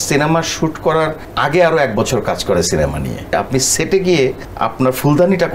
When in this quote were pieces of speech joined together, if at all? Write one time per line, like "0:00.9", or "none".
0:01.2
0:03.3
0:04.5

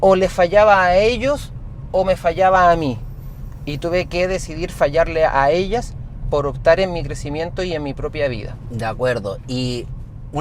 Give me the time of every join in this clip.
none

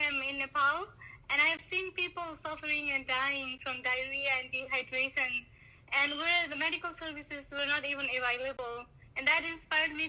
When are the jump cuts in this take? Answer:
none

